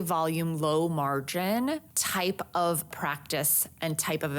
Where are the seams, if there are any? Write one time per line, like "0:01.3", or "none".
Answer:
0:02.0
0:02.9